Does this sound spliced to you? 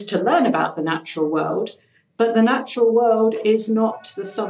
no; 0 cuts

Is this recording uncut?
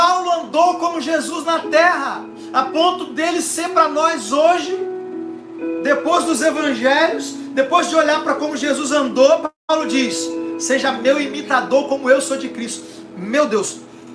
yes; 0 cuts

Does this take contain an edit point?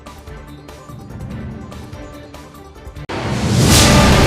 no; 0 cuts

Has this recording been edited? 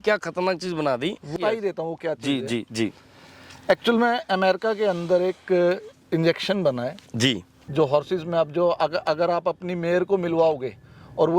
yes; 2 cuts; at 1.4 s, 7.5 s

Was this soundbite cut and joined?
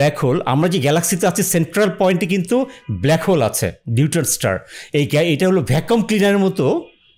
no; 0 cuts

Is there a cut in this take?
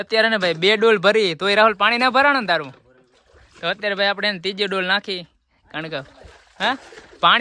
no; 0 cuts

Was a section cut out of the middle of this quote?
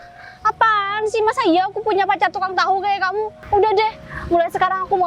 yes; 1 cut; at 3.3 s

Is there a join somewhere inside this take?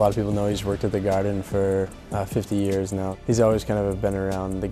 yes; 2 cuts; at 2.0 s, 3.2 s

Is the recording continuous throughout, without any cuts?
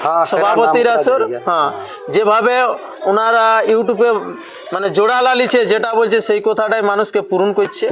yes; 0 cuts

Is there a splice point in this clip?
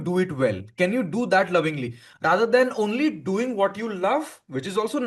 no; 0 cuts

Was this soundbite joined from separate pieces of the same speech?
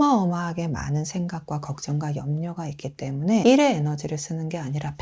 yes; 1 cut; at 3.4 s

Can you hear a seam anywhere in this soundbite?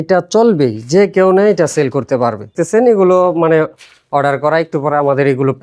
yes; 1 cut; at 2.6 s

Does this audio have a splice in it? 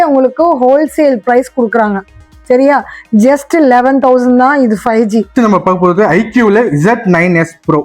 yes; 1 cut; at 5.3 s

